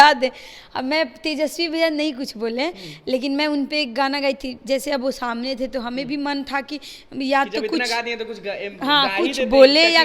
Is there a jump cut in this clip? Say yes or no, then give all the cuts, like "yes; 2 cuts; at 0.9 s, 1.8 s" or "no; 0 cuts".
no; 0 cuts